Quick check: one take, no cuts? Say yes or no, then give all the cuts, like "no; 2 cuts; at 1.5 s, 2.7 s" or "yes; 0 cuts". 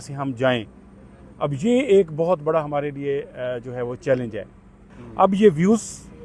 no; 1 cut; at 5.0 s